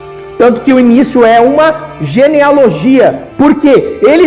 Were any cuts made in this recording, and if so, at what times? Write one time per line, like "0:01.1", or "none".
0:03.2

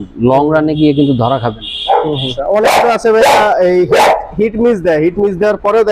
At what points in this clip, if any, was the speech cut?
0:02.3

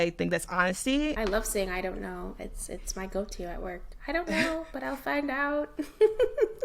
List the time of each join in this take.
0:01.2

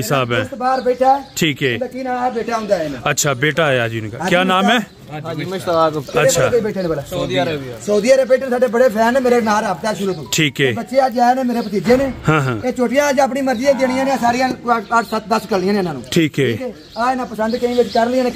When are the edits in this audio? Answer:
none

